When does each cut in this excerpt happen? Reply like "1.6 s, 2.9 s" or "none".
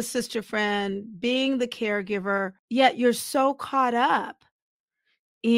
2.6 s